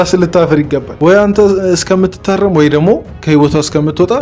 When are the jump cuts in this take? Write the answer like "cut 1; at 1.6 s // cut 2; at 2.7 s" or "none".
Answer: cut 1; at 0.9 s